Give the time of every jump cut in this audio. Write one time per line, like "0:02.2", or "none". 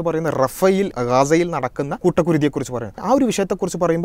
0:00.9
0:01.9
0:03.0